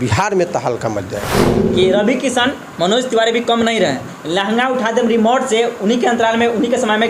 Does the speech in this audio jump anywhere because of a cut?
yes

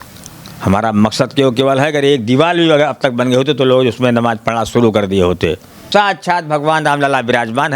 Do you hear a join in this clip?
yes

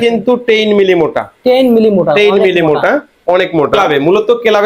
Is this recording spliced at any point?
yes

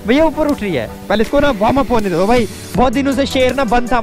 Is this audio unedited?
no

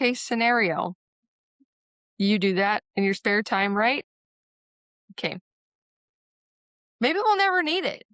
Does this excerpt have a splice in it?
no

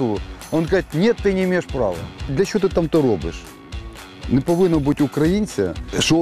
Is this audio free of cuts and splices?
no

